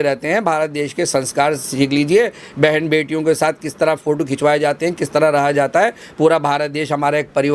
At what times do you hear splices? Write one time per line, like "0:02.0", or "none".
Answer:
none